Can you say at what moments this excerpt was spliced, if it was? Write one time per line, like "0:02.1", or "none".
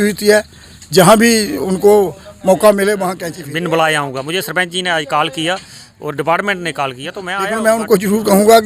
0:03.2
0:07.5